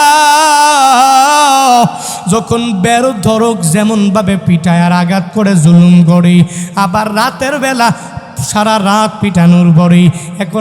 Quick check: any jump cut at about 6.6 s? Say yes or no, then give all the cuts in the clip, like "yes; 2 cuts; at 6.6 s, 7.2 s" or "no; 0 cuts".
no; 0 cuts